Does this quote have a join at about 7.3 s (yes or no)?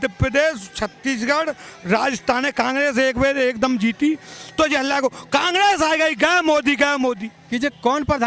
yes